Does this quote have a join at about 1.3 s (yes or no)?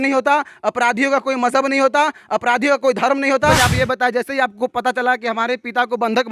no